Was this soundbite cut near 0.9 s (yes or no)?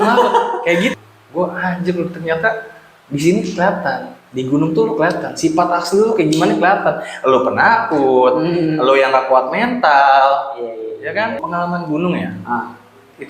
yes